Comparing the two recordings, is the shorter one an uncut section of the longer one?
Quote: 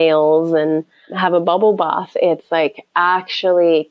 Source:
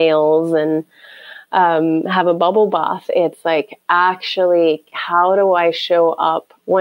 no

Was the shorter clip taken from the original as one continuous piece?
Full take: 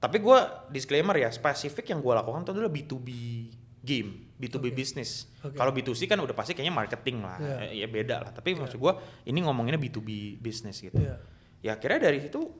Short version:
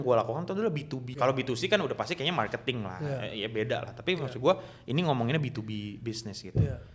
no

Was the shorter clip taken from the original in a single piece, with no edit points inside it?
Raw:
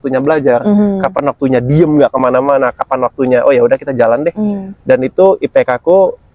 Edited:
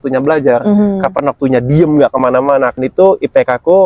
no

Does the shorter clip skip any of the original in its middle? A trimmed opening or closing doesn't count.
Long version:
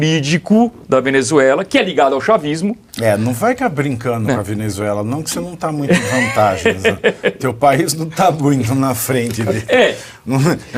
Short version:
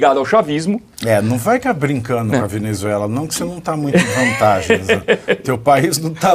no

